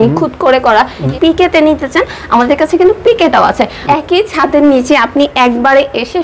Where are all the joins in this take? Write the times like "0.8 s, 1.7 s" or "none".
1.1 s, 3.8 s